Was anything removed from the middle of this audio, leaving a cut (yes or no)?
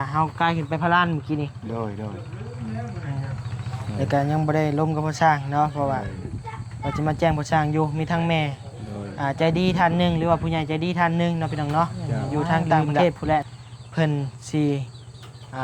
yes